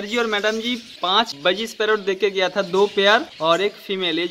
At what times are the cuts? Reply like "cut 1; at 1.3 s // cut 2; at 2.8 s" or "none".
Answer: cut 1; at 0.9 s // cut 2; at 3.3 s